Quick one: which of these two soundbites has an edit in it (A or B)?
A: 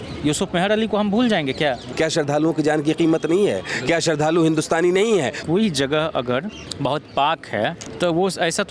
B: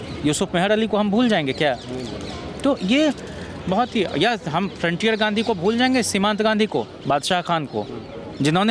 A